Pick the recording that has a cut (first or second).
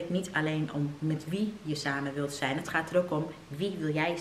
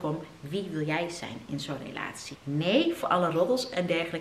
second